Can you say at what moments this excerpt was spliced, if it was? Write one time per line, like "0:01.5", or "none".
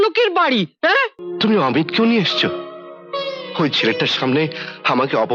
0:01.2